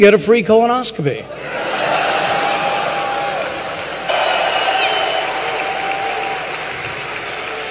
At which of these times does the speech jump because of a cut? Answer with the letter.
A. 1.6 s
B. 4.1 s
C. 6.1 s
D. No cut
D